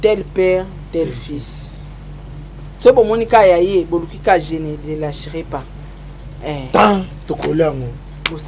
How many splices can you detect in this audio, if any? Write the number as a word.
zero